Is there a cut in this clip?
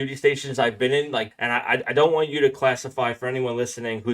yes; 1 cut; at 1.3 s

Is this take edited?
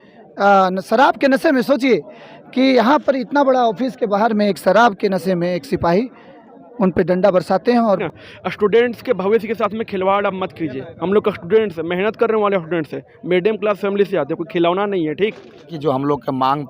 yes; 2 cuts; at 8.0 s, 15.7 s

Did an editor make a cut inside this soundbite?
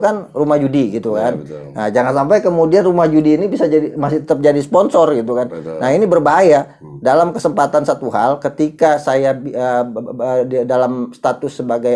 no; 0 cuts

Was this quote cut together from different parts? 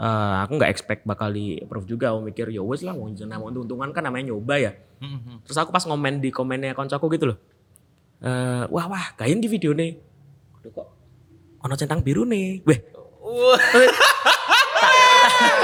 no; 0 cuts

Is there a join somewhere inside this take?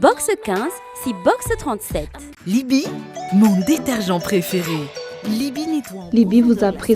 no; 0 cuts

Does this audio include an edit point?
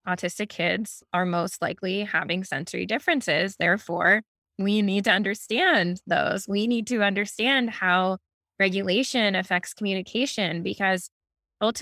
yes; 1 cut; at 1.0 s

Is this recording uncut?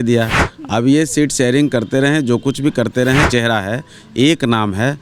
no; 1 cut; at 3.2 s

